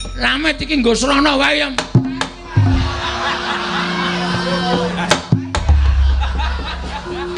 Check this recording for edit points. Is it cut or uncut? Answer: uncut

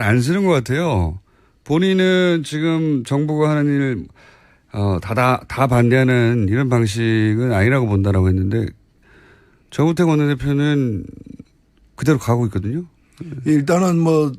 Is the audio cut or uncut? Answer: uncut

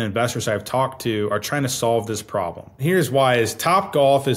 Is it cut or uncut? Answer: cut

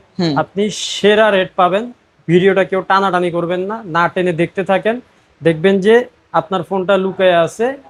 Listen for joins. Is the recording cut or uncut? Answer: uncut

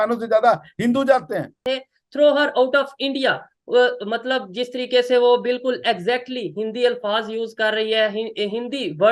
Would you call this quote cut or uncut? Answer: cut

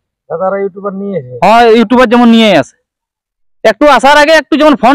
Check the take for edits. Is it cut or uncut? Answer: uncut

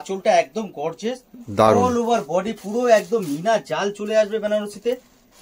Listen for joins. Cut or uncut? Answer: uncut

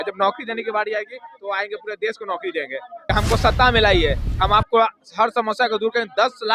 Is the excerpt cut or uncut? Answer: cut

